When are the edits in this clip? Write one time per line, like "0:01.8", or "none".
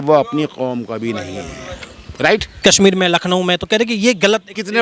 0:02.5